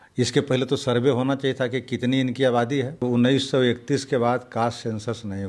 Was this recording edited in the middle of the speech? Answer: yes; 1 cut; at 3.0 s

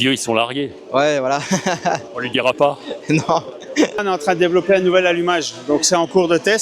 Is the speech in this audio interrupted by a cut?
yes; 1 cut; at 4.0 s

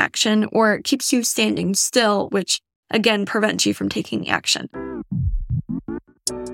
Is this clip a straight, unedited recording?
no; 1 cut; at 4.8 s

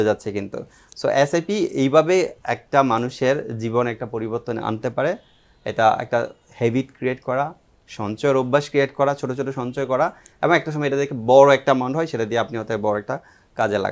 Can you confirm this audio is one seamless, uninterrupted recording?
yes; 0 cuts

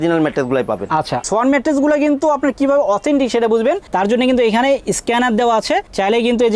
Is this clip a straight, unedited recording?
no; 1 cut; at 1.2 s

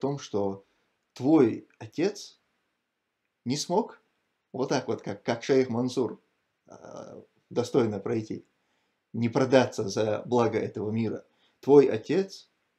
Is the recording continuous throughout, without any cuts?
yes; 0 cuts

